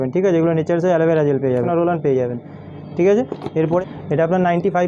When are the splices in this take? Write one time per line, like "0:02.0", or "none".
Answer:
0:01.7
0:03.8